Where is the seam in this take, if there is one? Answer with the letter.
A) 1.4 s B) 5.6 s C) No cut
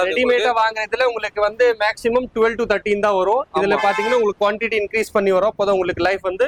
C